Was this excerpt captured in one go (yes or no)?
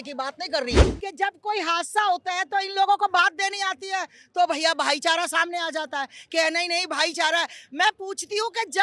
no